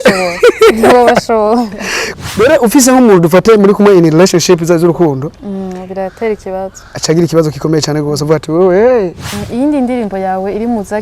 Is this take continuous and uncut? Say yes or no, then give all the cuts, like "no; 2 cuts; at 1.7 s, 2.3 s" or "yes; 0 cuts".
no; 1 cut; at 9.2 s